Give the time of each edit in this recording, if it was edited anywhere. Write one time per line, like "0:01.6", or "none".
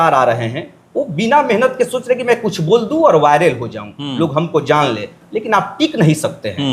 none